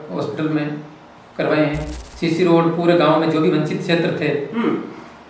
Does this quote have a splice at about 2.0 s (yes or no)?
yes